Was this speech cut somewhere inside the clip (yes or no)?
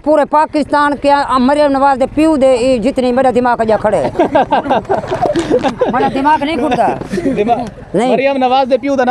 no